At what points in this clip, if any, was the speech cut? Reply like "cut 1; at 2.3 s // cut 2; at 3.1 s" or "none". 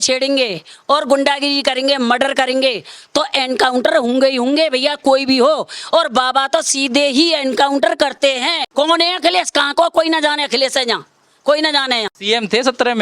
cut 1; at 8.6 s // cut 2; at 12.1 s

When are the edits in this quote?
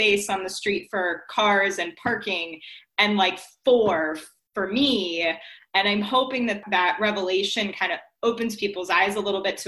cut 1; at 6.6 s

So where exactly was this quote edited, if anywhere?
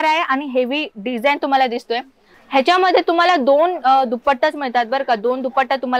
cut 1; at 2.3 s

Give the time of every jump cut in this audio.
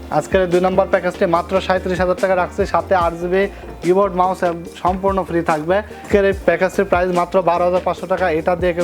cut 1; at 6.0 s

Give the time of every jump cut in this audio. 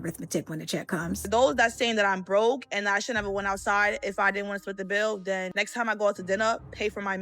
cut 1; at 1.3 s // cut 2; at 5.5 s

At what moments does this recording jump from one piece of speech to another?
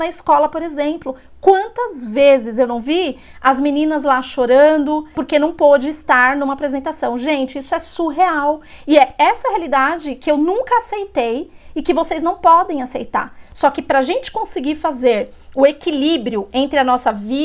cut 1; at 5.2 s

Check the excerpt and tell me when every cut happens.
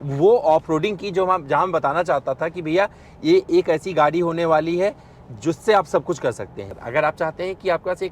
cut 1; at 6.7 s

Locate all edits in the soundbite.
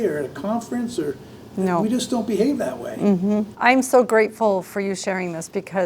cut 1; at 3.5 s

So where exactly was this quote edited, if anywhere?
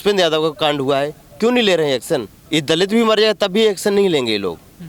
cut 1; at 2.4 s

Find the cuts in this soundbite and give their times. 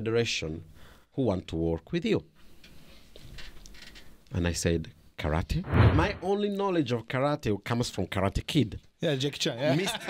cut 1; at 5.8 s

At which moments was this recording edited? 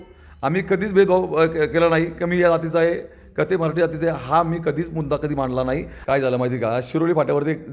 cut 1; at 5.9 s

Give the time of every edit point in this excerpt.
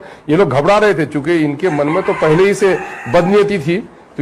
none

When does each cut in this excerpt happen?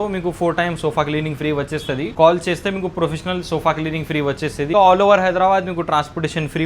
cut 1; at 2.1 s // cut 2; at 4.7 s

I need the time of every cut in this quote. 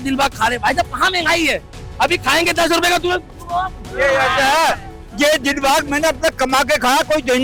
none

